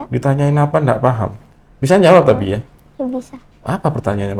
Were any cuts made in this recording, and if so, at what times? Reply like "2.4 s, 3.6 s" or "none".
none